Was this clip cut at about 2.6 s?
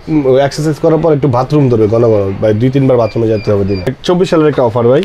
no; 1 cut; at 4.0 s

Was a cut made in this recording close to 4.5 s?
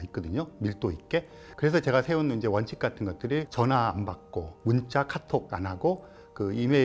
yes; 4 cuts; at 1.5 s, 3.5 s, 4.5 s, 5.5 s

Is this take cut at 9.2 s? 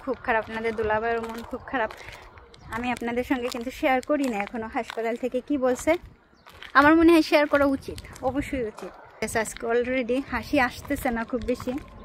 yes; 1 cut; at 9.2 s

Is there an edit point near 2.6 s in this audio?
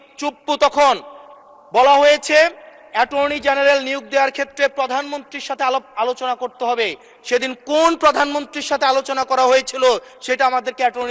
no; 0 cuts

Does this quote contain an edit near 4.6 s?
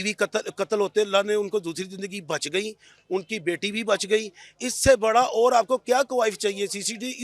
no; 0 cuts

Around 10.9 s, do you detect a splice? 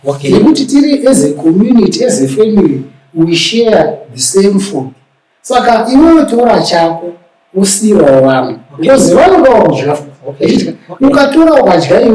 no; 0 cuts

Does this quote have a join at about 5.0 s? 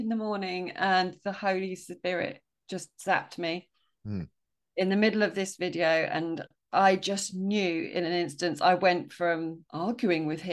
no; 1 cut; at 9.6 s

